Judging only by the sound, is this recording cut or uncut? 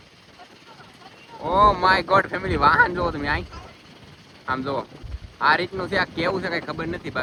uncut